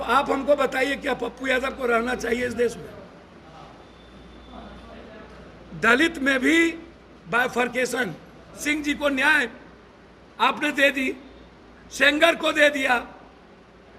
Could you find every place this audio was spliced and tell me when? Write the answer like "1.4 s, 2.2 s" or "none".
8.6 s